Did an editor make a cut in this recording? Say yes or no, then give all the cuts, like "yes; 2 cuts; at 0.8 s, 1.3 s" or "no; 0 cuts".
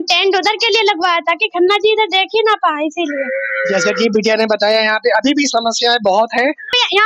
no; 0 cuts